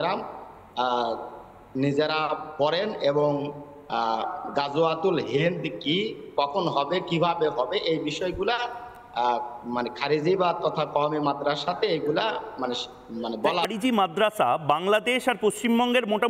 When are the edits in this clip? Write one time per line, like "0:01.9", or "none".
0:13.6

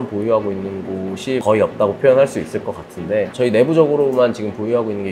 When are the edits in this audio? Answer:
0:01.4
0:03.3

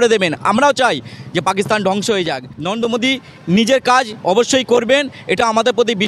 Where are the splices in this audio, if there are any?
0:02.6

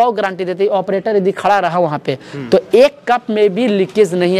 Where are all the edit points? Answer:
none

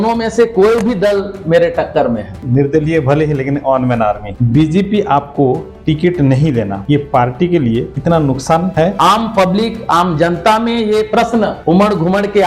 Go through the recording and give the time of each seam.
0:02.4
0:04.3
0:08.9

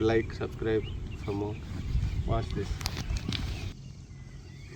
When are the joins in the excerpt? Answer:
0:03.7

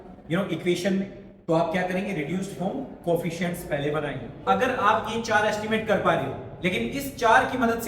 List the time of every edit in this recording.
0:04.4

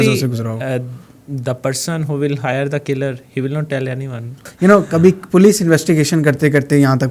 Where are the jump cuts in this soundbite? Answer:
0:04.4

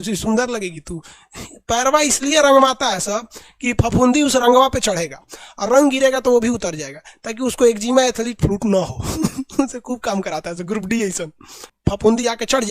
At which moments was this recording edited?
0:11.7

